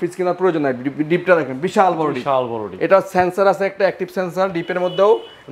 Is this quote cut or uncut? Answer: uncut